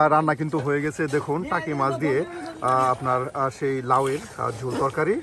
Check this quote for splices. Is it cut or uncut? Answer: uncut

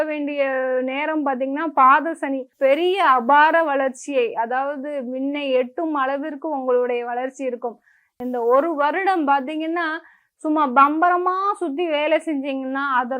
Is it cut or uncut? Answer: cut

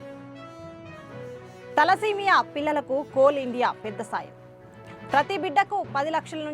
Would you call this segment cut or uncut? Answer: uncut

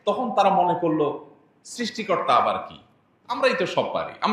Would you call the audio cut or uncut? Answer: uncut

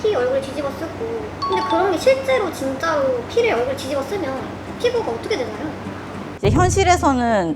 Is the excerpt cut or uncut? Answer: uncut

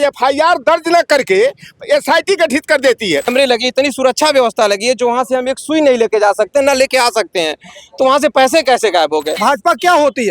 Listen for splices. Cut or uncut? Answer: cut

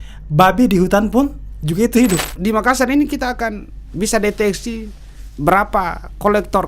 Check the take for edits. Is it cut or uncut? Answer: cut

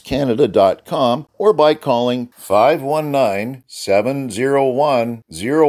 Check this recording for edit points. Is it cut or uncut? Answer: cut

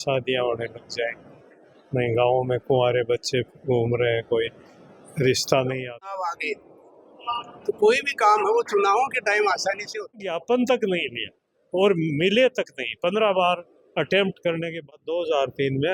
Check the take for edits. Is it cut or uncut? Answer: cut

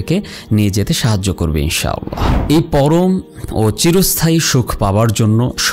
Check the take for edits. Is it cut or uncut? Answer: cut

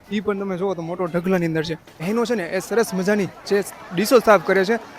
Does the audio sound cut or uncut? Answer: cut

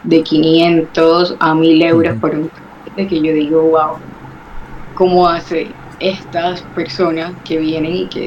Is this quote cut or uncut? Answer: uncut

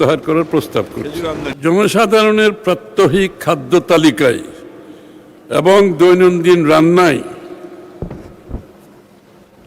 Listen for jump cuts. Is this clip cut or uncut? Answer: cut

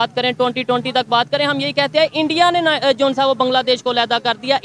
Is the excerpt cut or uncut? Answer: uncut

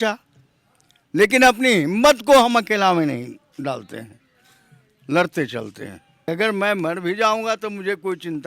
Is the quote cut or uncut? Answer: cut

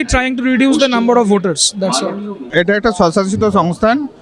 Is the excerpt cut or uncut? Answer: cut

